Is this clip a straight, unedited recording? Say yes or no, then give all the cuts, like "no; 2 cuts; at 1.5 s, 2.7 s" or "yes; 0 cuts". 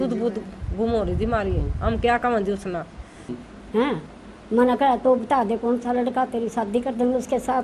no; 1 cut; at 3.5 s